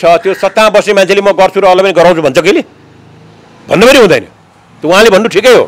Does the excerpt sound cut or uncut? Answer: uncut